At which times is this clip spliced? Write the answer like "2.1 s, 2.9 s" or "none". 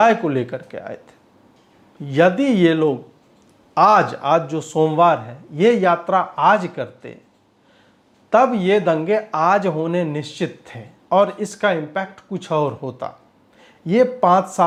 none